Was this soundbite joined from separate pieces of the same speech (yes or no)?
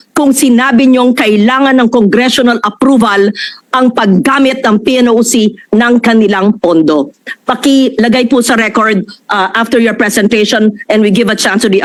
no